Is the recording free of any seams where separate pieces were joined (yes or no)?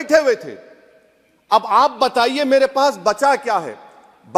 yes